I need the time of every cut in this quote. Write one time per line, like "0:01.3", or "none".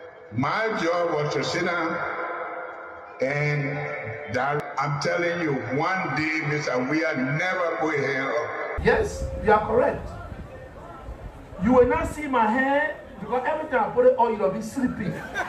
0:04.6